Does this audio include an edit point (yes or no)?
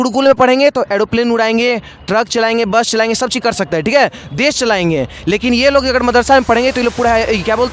no